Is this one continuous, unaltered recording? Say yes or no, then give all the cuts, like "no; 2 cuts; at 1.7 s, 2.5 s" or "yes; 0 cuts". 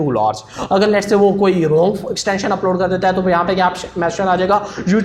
yes; 0 cuts